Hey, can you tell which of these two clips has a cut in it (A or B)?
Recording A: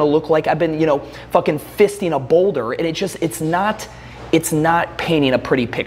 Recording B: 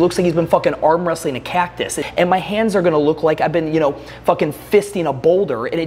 B